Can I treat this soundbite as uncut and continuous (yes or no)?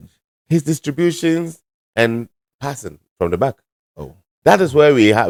yes